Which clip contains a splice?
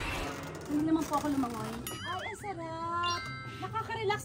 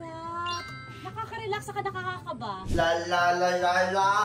second; 1 cut; at 2.6 s

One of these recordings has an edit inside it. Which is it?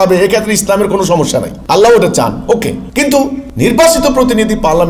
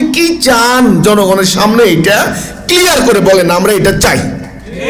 first; 2 cuts; at 1.5 s, 3.1 s

